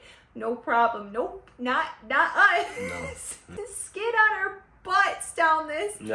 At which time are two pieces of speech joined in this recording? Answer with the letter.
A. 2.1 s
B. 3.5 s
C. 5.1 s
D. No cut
B